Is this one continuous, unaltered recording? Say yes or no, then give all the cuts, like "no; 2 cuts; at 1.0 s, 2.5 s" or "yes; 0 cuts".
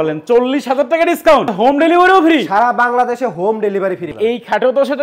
no; 2 cuts; at 1.5 s, 4.1 s